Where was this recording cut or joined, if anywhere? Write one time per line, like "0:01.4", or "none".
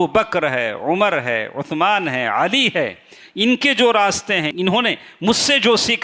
0:04.5